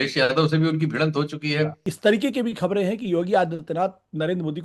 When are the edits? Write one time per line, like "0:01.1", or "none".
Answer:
0:01.9